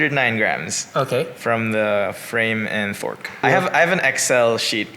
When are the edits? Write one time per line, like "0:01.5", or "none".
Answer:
0:03.3